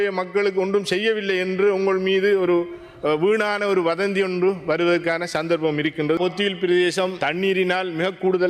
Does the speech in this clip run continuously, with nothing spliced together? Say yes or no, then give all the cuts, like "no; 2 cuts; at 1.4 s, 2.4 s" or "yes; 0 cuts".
no; 1 cut; at 6.2 s